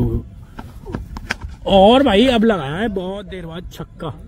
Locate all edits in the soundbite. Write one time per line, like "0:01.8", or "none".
none